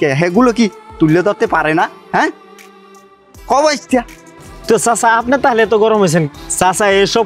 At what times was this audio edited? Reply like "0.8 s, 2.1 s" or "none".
none